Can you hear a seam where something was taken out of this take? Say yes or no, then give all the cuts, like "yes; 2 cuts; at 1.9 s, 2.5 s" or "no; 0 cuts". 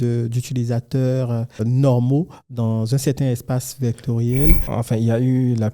yes; 2 cuts; at 1.6 s, 4.7 s